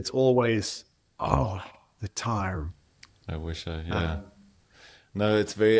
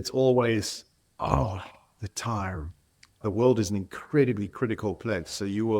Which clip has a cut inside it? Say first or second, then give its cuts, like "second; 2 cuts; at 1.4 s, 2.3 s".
second; 1 cut; at 3.2 s